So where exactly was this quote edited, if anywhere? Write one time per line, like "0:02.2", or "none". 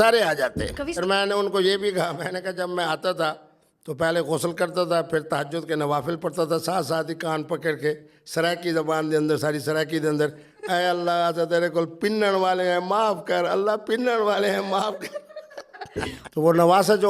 0:01.0
0:16.2

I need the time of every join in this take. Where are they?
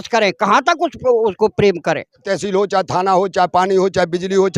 0:02.3

